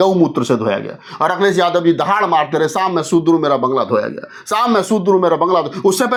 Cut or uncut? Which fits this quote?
uncut